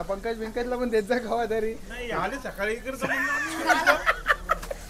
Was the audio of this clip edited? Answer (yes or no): no